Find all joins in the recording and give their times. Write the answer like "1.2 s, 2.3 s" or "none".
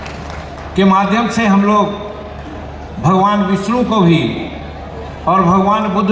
none

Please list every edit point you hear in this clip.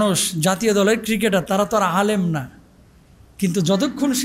none

